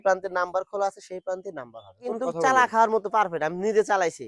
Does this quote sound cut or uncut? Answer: cut